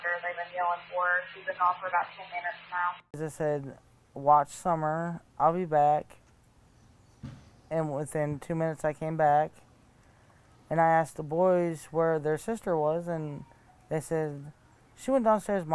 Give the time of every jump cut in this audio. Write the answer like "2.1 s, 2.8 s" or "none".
3.1 s

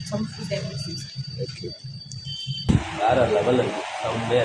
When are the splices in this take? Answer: 2.7 s

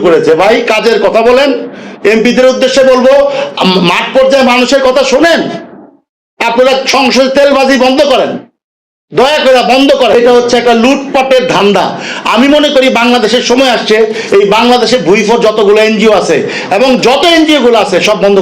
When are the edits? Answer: 10.1 s

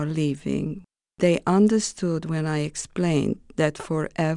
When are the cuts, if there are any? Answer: none

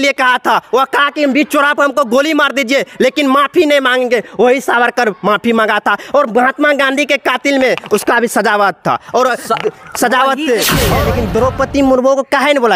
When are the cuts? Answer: 11.0 s

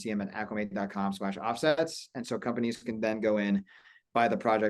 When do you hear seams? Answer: none

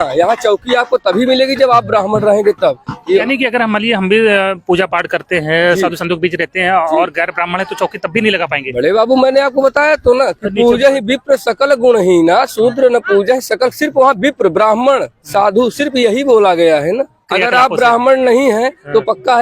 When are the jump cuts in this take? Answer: 3.2 s, 17.2 s

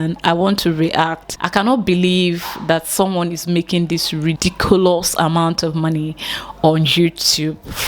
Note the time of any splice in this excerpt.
1.3 s, 4.4 s

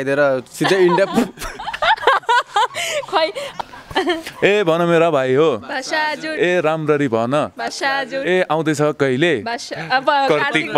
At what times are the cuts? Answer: 3.5 s

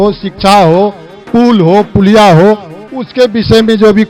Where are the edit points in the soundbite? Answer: none

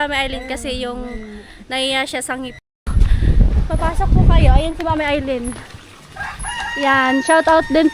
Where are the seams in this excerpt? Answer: 2.9 s

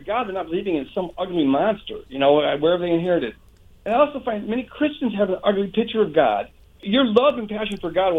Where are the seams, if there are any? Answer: 6.8 s

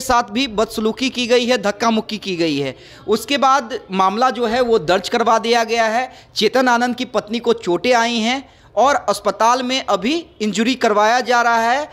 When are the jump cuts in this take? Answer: none

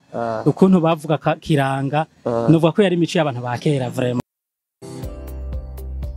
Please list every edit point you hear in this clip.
4.2 s

